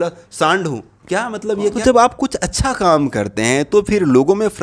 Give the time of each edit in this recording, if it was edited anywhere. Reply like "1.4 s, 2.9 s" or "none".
1.8 s